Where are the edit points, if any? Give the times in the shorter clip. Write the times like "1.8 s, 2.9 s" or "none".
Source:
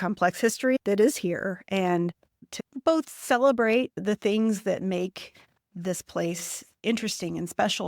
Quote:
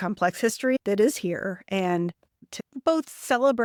none